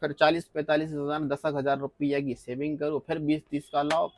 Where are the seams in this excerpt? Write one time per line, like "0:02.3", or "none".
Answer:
none